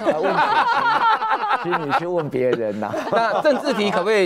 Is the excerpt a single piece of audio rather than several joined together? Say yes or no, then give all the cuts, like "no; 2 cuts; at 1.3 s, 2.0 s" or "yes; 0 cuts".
yes; 0 cuts